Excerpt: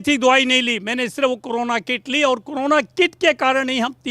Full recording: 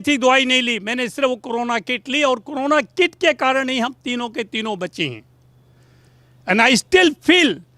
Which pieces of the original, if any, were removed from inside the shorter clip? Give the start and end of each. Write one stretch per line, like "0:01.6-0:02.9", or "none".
none